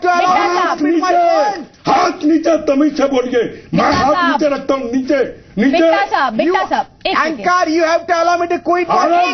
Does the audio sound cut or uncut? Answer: uncut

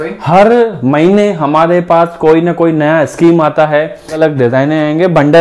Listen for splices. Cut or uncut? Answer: cut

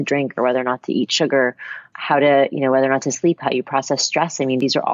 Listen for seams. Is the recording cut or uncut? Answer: uncut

